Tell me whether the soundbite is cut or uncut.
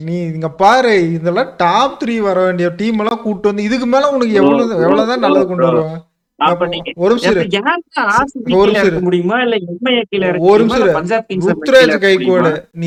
uncut